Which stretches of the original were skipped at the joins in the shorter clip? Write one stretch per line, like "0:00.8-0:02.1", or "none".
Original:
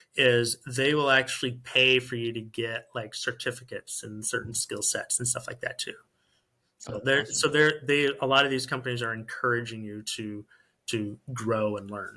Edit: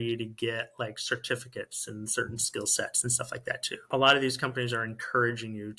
0:06.0-0:08.2